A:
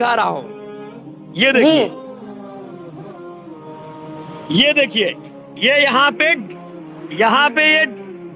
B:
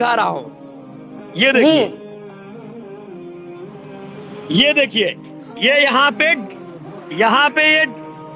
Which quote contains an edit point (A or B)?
B